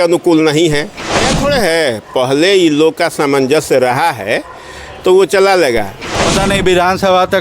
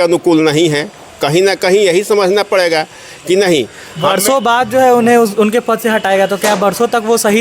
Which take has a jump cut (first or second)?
first